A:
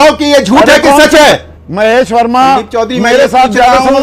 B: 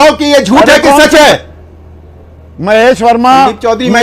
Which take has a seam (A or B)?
A